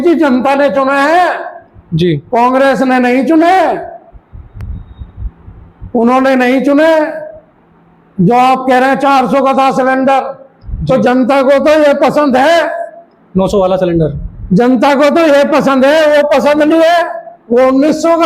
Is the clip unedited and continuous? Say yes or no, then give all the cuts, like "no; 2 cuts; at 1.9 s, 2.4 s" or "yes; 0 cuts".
yes; 0 cuts